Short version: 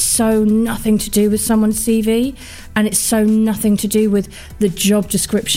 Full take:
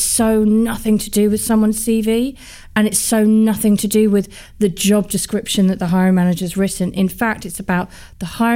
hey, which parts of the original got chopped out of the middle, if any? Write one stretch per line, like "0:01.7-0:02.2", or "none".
none